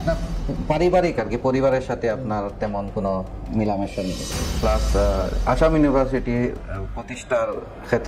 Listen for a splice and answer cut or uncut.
cut